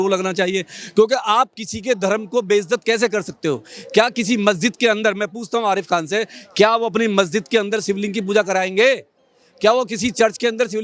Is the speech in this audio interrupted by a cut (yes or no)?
no